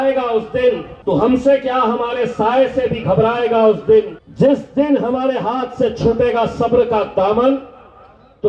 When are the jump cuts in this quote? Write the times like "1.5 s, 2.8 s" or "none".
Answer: 0.9 s, 4.2 s